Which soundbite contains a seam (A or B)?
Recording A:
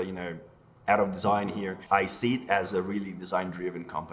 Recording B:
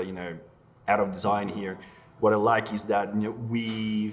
A